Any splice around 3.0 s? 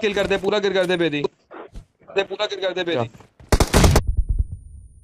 yes; 1 cut; at 3.0 s

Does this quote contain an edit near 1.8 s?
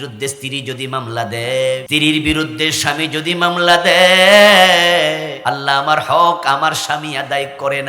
yes; 2 cuts; at 1.8 s, 5.3 s

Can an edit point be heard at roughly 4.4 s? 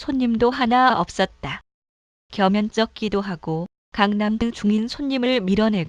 no; 0 cuts

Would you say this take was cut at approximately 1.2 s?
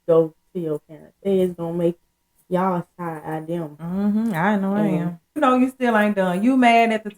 yes; 2 cuts; at 1.2 s, 5.4 s

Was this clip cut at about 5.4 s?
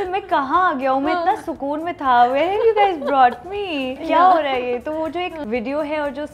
yes; 2 cuts; at 4.0 s, 5.4 s

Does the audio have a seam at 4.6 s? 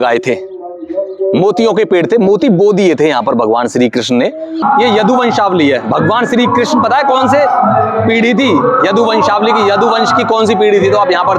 yes; 1 cut; at 4.6 s

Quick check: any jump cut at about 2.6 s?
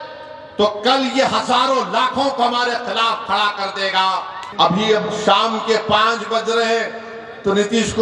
no; 1 cut; at 4.4 s

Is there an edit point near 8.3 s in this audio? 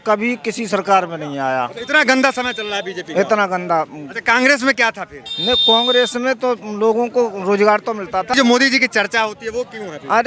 yes; 1 cut; at 8.3 s

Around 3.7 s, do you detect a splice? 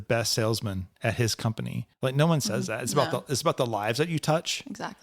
no; 1 cut; at 1.8 s

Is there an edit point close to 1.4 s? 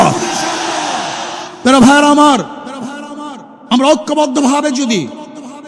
yes; 1 cut; at 1.4 s

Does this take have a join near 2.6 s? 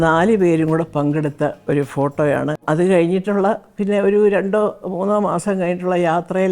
yes; 1 cut; at 2.6 s

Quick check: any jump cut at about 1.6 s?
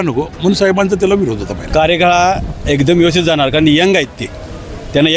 yes; 1 cut; at 1.6 s

